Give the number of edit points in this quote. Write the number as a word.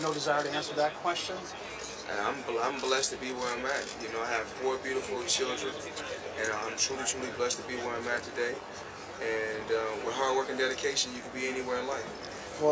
one